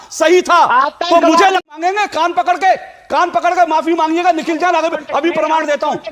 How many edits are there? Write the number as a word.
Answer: one